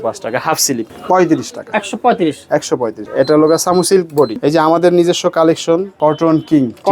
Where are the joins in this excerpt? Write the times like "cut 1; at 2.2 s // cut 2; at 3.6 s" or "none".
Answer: cut 1; at 0.9 s // cut 2; at 3.1 s // cut 3; at 4.4 s